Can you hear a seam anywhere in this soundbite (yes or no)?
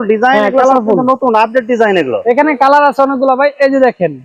no